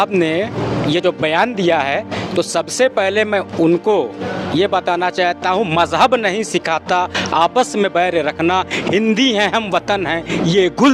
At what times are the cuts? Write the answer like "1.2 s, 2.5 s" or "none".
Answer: none